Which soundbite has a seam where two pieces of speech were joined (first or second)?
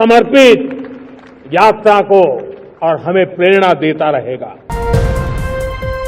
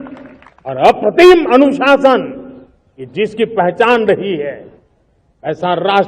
first